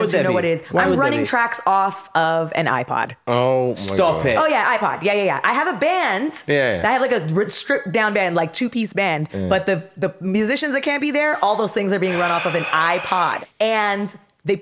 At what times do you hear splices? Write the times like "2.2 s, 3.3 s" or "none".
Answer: 13.4 s